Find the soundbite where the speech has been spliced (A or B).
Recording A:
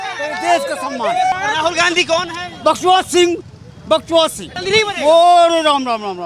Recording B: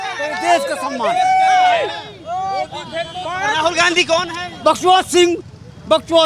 A